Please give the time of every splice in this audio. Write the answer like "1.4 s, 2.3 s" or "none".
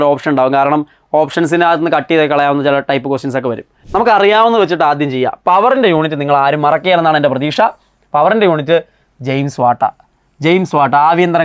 3.8 s